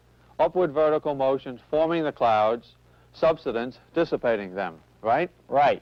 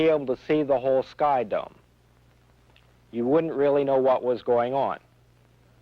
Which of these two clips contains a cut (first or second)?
second